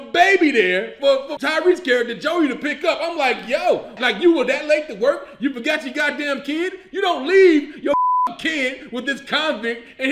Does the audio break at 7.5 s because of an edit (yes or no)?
no